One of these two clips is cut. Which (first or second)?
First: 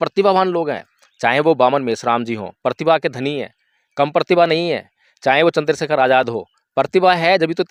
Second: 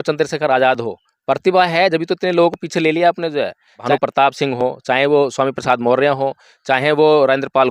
second